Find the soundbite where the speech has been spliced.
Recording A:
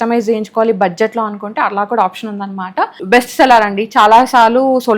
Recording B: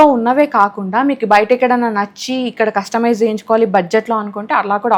A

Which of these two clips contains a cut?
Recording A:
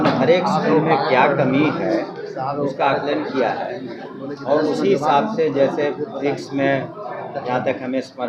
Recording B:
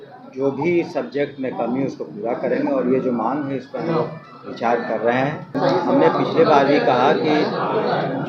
B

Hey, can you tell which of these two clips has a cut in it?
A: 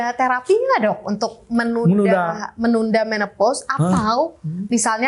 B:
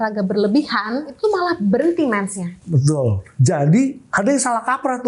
B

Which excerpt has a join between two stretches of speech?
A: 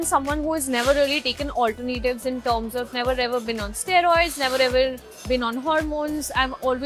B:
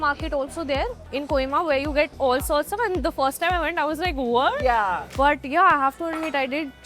B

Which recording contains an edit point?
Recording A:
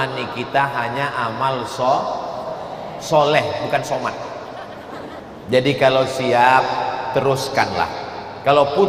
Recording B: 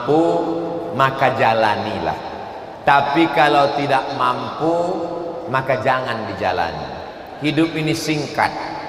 A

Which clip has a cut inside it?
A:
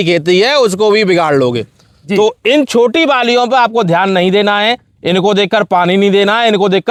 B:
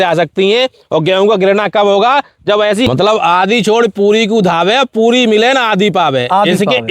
B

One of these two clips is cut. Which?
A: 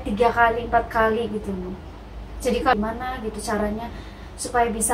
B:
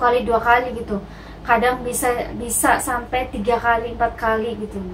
A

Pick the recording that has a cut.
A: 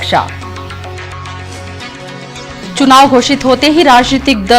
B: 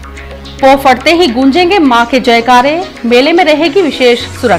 A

